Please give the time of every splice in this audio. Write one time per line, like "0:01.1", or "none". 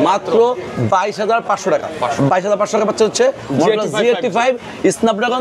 none